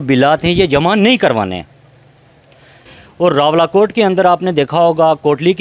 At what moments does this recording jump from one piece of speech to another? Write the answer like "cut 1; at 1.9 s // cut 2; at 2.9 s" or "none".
cut 1; at 3.0 s